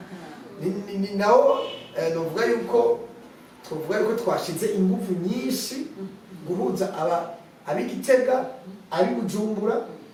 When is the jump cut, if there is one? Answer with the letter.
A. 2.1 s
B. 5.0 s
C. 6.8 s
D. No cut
D